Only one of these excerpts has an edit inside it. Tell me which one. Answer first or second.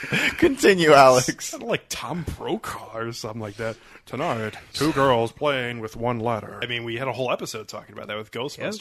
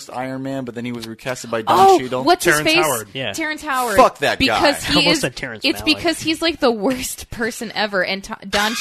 first